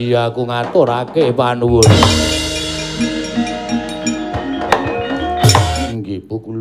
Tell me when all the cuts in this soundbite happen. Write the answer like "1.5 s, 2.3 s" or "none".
5.7 s